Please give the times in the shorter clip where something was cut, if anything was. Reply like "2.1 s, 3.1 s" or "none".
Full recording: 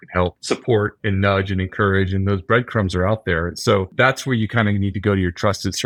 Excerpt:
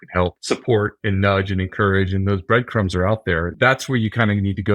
3.5 s